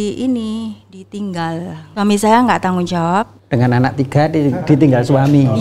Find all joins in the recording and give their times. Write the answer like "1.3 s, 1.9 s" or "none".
1.8 s, 3.4 s